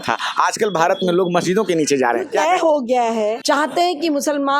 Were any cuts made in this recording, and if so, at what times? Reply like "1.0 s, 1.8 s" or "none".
2.3 s, 3.4 s

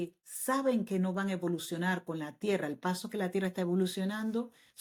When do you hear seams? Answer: none

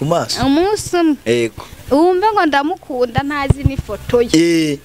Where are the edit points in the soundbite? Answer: none

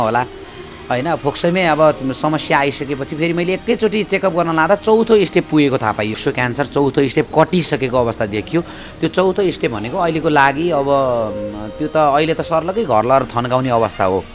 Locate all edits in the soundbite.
6.2 s

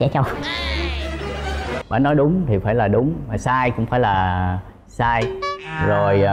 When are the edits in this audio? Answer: 1.7 s

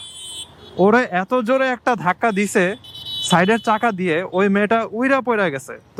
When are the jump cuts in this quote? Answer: none

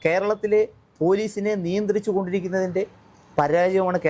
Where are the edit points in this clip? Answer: none

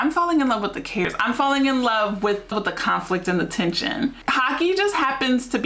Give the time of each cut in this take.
1.0 s, 2.5 s, 4.2 s

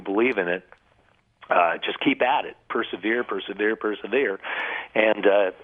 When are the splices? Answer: none

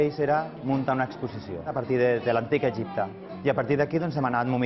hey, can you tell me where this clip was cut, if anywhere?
1.7 s, 3.2 s

